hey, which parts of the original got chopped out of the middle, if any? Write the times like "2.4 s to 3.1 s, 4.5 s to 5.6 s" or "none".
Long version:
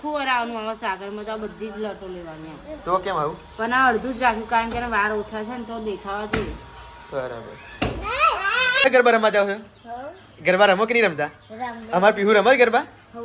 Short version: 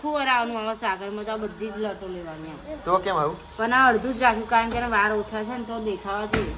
none

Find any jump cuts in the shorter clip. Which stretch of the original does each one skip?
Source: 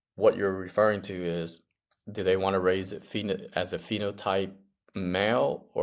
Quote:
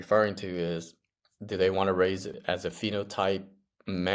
3.0 s to 3.5 s

